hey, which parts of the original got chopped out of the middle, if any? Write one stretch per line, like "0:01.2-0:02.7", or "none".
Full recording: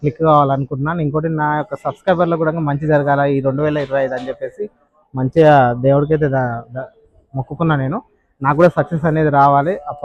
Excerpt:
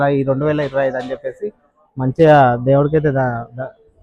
none